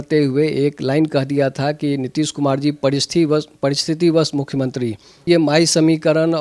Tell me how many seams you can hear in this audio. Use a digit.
1